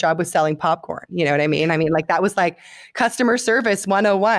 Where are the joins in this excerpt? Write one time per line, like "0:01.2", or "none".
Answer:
none

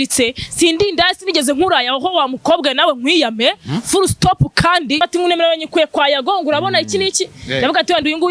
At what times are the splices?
0:05.0

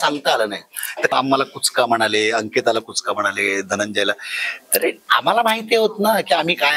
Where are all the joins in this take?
0:01.1

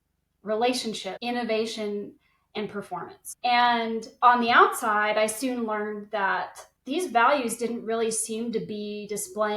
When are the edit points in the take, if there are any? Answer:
0:01.1
0:03.2
0:06.7

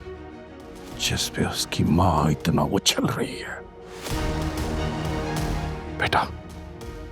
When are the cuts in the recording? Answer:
0:05.9

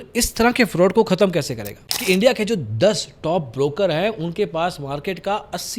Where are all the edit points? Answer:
0:01.8

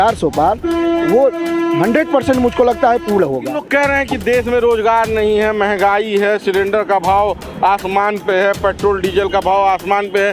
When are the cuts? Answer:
0:03.5

